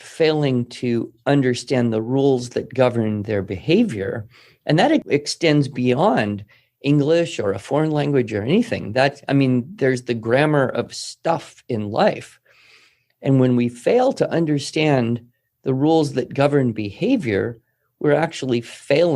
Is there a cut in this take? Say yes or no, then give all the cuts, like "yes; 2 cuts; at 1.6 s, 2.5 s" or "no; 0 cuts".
yes; 1 cut; at 5.1 s